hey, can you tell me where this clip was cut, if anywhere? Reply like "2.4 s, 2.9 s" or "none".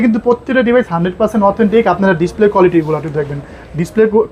none